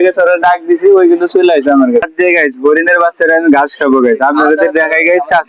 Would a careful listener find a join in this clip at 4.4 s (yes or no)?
no